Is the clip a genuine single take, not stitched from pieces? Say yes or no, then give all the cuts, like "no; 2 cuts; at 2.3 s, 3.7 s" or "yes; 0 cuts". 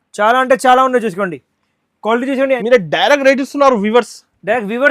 no; 1 cut; at 2.6 s